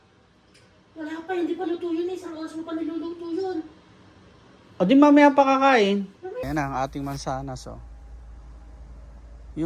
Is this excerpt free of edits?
no; 1 cut; at 6.4 s

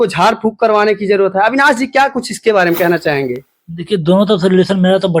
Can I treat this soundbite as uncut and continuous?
yes; 0 cuts

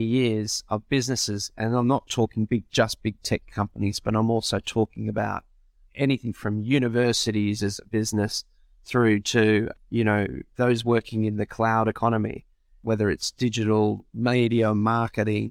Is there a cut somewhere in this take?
no; 0 cuts

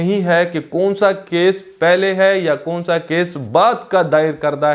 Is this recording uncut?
yes; 0 cuts

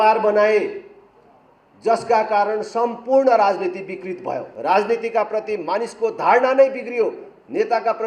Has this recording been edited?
yes; 1 cut; at 4.5 s

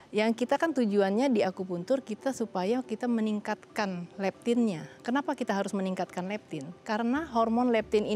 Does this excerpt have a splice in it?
no; 0 cuts

